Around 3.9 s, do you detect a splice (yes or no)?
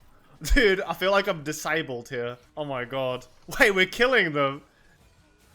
no